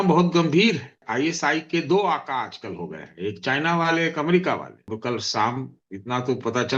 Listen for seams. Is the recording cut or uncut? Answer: cut